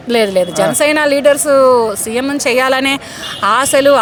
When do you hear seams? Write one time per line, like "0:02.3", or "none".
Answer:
none